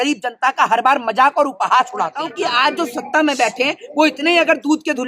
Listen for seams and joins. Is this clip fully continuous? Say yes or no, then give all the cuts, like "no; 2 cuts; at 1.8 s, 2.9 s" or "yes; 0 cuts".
no; 1 cut; at 2.3 s